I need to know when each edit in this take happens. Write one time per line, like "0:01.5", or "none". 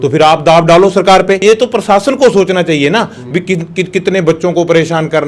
0:01.4